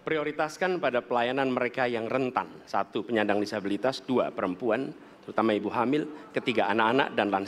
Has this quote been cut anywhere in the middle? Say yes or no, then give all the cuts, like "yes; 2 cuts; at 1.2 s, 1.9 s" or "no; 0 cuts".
no; 0 cuts